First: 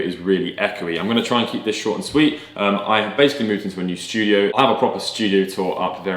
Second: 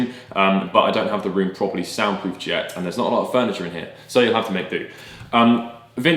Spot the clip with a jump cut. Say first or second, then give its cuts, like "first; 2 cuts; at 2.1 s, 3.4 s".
first; 1 cut; at 4.5 s